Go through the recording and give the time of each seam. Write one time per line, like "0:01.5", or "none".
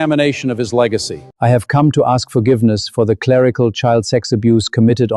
0:01.2